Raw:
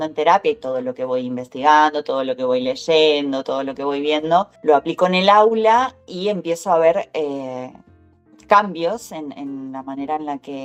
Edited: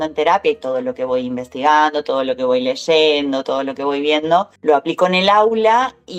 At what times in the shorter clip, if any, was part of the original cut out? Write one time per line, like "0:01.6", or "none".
none